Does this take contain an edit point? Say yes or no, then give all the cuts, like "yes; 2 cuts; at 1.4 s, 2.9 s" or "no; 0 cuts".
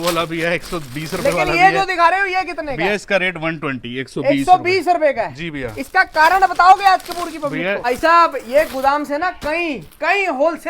yes; 1 cut; at 7.8 s